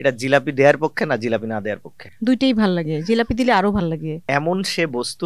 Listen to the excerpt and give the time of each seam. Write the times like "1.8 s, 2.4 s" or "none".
4.1 s